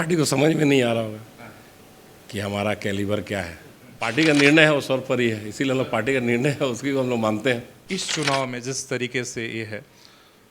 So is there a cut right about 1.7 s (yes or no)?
no